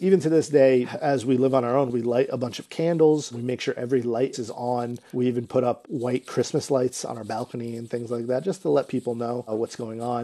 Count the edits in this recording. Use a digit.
5